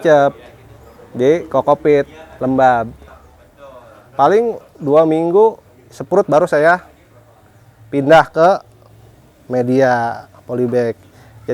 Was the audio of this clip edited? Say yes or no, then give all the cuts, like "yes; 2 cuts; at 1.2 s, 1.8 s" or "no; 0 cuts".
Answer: no; 0 cuts